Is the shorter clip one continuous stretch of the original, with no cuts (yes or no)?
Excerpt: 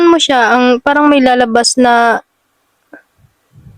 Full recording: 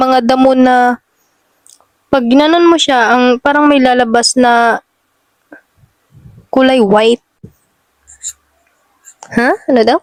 yes